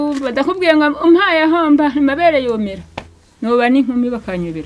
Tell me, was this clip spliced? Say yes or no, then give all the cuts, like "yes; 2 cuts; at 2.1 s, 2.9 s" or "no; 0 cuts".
no; 0 cuts